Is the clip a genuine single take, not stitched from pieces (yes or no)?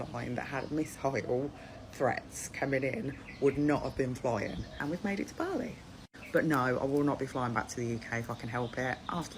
no